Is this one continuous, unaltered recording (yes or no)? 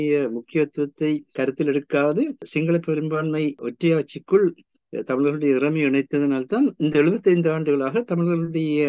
no